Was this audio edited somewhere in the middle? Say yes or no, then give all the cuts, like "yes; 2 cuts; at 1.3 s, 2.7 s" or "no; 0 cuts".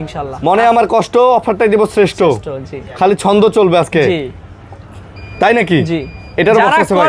no; 0 cuts